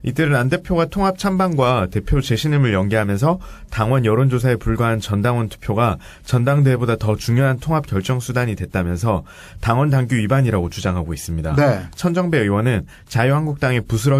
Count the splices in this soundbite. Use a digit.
1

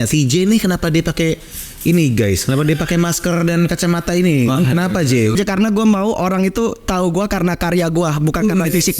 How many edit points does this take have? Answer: 1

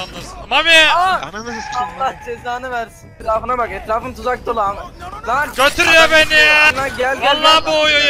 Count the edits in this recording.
2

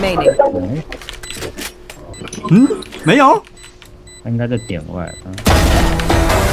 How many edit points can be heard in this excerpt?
1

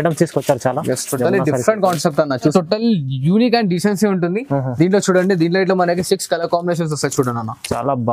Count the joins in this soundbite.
1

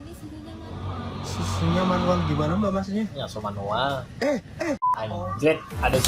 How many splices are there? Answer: 1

